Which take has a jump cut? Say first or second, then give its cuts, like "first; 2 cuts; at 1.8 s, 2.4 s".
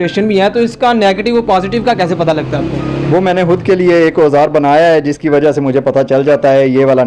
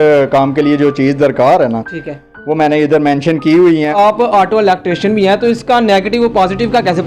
second; 1 cut; at 3.9 s